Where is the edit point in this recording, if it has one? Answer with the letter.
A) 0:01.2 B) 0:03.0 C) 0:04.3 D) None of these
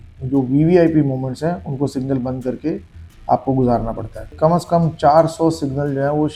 C